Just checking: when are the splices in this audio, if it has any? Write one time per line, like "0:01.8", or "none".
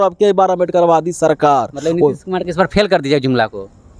none